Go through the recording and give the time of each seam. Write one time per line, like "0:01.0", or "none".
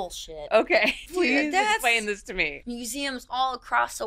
0:01.0
0:02.6